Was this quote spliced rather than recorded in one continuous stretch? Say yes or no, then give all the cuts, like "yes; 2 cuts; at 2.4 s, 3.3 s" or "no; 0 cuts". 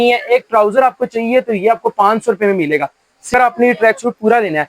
yes; 1 cut; at 3.3 s